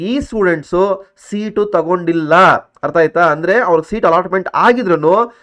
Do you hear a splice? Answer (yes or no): no